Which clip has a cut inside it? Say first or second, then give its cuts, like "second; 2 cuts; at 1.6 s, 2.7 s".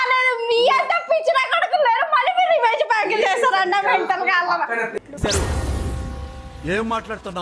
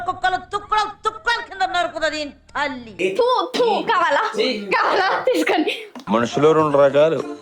second; 1 cut; at 3.0 s